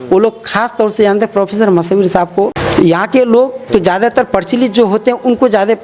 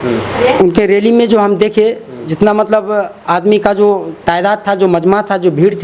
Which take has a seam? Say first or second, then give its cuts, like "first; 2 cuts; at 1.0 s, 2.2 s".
first; 2 cuts; at 2.6 s, 3.6 s